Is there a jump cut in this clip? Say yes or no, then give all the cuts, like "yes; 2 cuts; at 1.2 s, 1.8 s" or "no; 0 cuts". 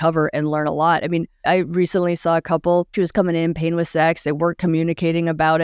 yes; 2 cuts; at 1.3 s, 2.9 s